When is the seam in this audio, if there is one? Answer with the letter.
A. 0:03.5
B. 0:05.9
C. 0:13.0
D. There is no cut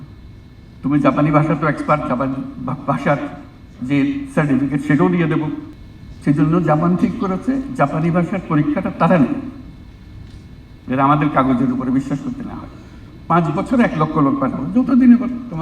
C